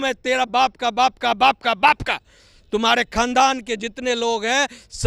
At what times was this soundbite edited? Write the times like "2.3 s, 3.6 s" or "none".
none